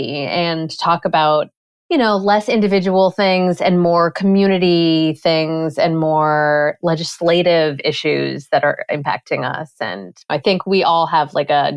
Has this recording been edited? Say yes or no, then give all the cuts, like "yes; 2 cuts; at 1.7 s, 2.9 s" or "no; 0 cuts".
yes; 1 cut; at 10.3 s